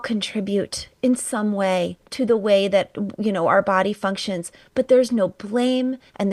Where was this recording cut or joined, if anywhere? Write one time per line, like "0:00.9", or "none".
none